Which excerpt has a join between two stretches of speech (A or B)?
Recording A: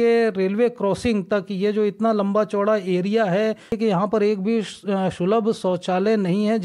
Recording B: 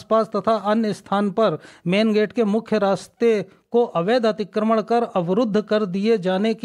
A